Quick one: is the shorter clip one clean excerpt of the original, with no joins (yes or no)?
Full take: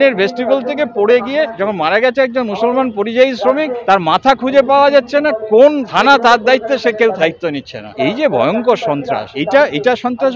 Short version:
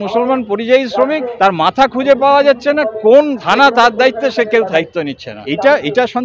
no